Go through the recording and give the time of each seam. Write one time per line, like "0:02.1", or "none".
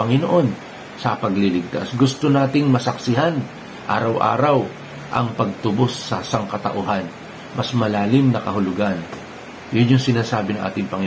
none